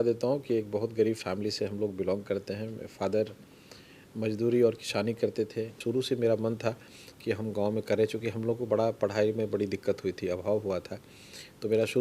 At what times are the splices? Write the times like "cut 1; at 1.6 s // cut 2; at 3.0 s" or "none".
cut 1; at 5.8 s